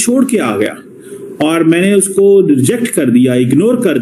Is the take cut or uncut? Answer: uncut